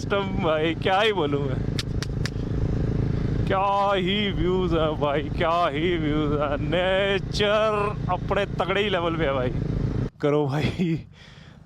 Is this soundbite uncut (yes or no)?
no